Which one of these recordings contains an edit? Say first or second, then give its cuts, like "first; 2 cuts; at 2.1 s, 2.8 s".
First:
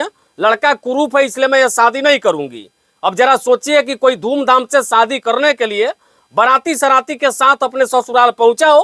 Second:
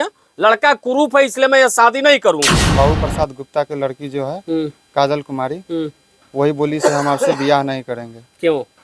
second; 1 cut; at 2.6 s